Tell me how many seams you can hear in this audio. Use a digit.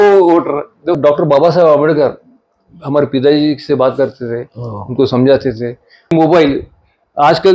2